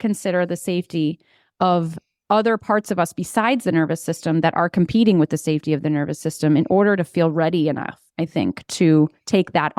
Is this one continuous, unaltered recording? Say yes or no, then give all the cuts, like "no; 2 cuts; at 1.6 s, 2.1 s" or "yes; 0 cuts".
yes; 0 cuts